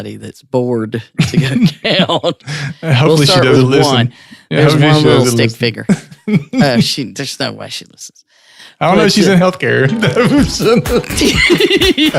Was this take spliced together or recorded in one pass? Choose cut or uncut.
cut